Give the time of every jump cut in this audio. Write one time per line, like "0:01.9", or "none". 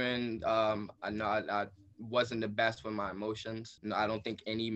0:00.9
0:03.7